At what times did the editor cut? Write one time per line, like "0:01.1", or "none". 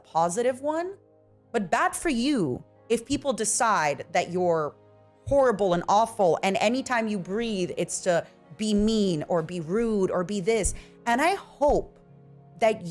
0:01.4